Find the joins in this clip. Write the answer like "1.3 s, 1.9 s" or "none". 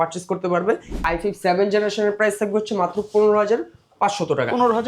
1.1 s